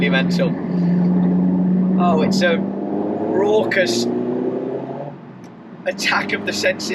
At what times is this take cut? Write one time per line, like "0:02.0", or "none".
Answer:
none